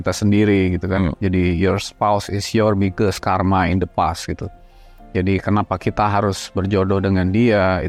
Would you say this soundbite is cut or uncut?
uncut